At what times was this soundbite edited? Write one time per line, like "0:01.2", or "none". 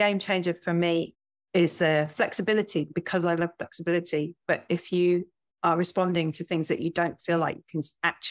0:01.2
0:02.9